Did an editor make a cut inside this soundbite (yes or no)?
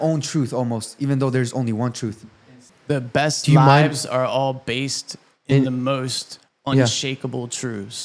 yes